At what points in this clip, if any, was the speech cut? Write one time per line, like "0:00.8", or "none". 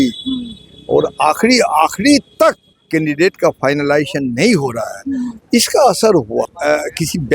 0:02.7
0:05.4
0:06.5